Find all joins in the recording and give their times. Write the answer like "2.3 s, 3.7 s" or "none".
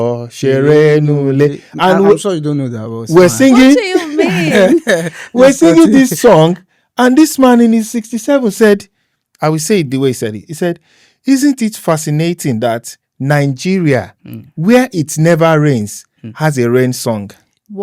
none